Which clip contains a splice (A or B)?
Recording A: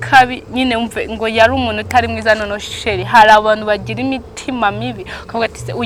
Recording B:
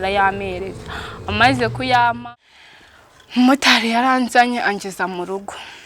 B